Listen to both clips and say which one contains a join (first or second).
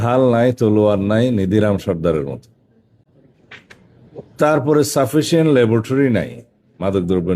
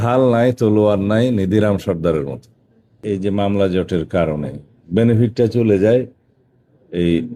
second